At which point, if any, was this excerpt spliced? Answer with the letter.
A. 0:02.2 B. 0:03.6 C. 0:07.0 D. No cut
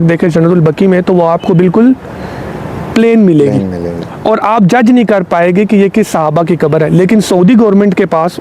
D